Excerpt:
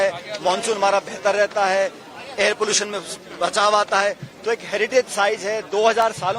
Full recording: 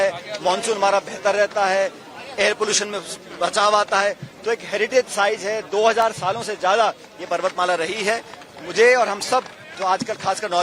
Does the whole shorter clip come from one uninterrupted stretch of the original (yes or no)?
yes